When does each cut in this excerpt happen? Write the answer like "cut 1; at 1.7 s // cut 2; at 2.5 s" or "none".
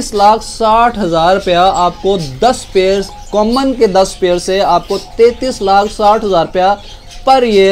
none